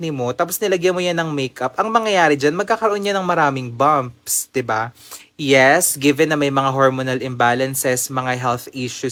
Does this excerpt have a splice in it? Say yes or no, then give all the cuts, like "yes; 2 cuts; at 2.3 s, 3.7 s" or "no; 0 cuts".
no; 0 cuts